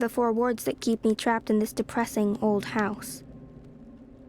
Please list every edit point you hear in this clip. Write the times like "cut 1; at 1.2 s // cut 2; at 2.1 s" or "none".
cut 1; at 3.0 s